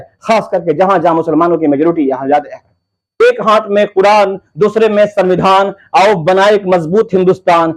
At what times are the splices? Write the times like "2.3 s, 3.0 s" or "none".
3.2 s